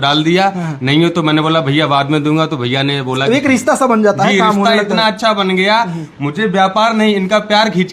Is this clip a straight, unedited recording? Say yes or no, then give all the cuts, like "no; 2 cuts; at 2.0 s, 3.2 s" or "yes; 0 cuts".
yes; 0 cuts